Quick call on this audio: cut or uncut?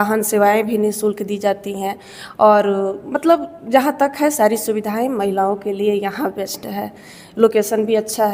uncut